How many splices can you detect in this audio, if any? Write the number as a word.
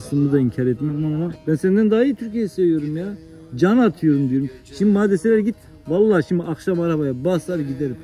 one